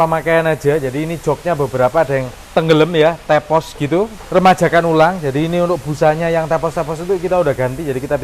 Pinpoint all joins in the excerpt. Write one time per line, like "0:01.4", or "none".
0:02.4
0:04.3